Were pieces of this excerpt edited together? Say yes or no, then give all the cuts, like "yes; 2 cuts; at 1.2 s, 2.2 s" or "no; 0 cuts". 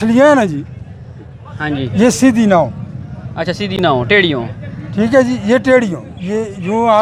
no; 0 cuts